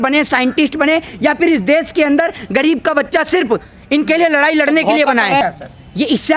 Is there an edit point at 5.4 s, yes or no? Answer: yes